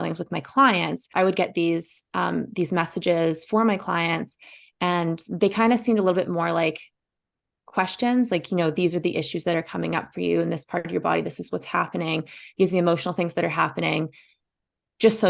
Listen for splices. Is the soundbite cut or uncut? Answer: cut